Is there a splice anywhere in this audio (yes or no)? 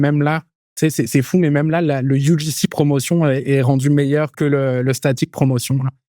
yes